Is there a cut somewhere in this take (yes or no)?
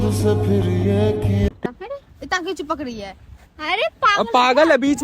yes